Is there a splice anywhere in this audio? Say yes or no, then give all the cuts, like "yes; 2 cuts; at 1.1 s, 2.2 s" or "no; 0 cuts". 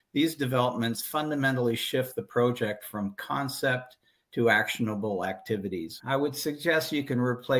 yes; 1 cut; at 5.9 s